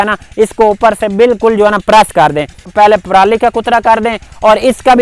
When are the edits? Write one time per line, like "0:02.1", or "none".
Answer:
0:02.7